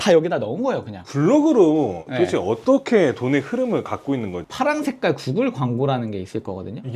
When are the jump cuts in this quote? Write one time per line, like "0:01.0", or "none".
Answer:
0:01.1
0:04.4